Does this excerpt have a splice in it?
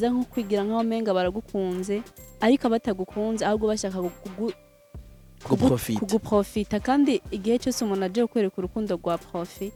no; 0 cuts

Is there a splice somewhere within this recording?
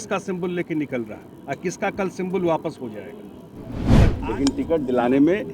yes; 1 cut; at 4.0 s

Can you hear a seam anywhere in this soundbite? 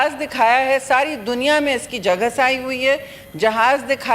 no; 0 cuts

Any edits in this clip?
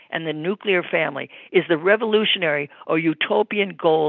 no; 0 cuts

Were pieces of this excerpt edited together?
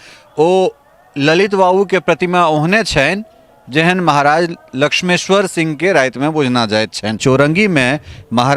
yes; 1 cut; at 7.2 s

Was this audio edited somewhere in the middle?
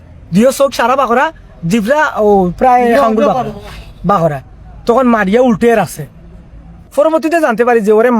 yes; 1 cut; at 6.8 s

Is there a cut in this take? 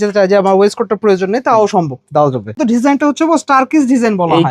yes; 1 cut; at 2.6 s

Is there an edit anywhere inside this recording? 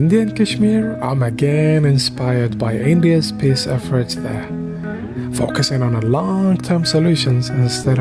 no; 0 cuts

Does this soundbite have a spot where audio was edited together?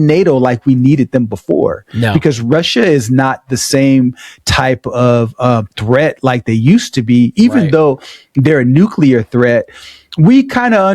no; 0 cuts

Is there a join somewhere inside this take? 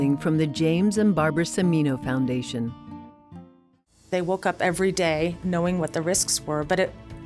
yes; 1 cut; at 4.1 s

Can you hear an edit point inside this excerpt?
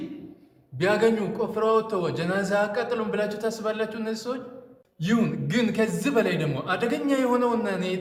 no; 0 cuts

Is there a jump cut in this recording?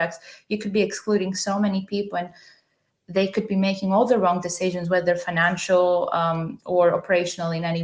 no; 0 cuts

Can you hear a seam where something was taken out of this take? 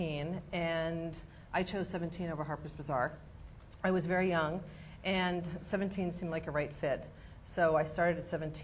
yes; 1 cut; at 1.6 s

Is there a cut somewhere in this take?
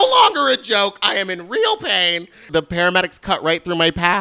yes; 1 cut; at 2.5 s

